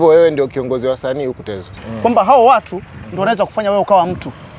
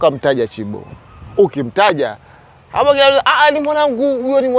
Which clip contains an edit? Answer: first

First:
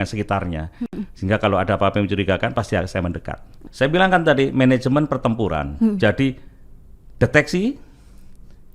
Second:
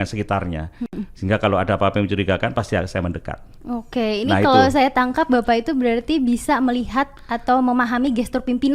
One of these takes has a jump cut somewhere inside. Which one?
first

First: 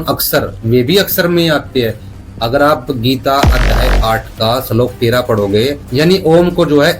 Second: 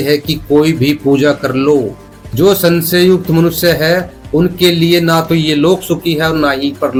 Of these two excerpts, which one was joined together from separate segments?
first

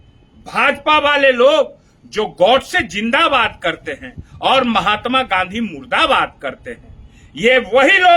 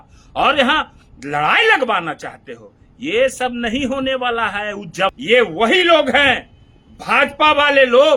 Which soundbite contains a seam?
second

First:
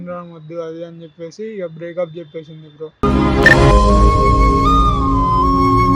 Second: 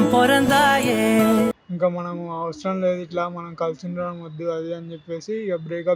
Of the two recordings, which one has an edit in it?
second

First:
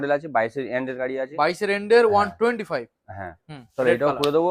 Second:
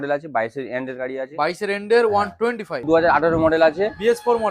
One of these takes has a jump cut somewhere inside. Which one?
second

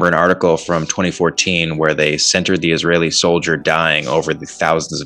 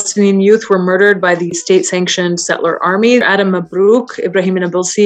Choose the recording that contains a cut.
second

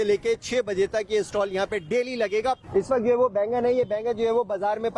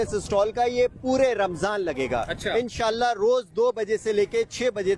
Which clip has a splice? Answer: first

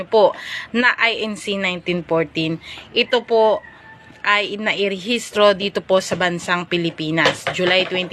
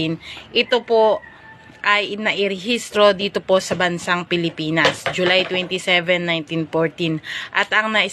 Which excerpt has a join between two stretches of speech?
second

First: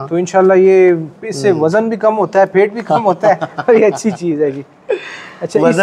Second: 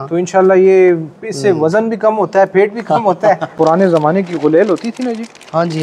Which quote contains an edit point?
second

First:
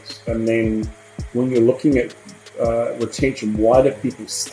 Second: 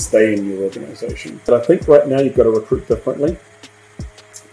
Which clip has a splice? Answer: second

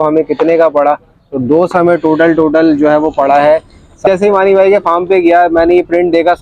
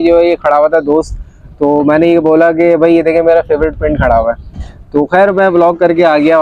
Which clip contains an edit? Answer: first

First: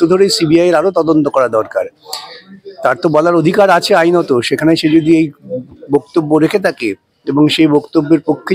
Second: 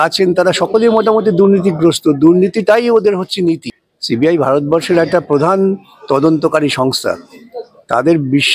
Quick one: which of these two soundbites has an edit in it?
second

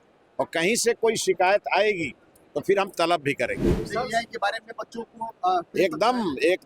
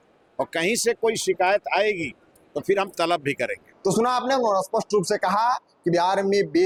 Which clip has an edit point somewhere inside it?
first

